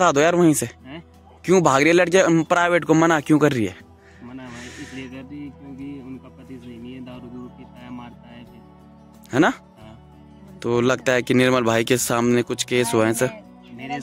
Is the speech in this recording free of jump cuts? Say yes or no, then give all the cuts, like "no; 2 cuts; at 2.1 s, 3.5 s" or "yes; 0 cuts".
yes; 0 cuts